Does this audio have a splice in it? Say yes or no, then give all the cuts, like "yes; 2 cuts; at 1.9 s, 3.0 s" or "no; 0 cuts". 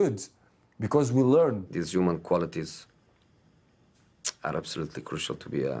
yes; 1 cut; at 1.7 s